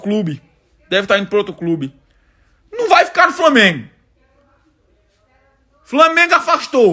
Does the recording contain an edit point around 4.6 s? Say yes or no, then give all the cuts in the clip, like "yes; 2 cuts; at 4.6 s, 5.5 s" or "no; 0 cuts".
no; 0 cuts